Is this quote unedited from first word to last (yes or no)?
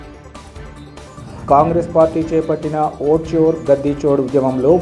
no